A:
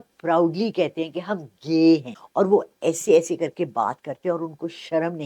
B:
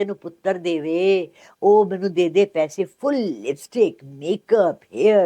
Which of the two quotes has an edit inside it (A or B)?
A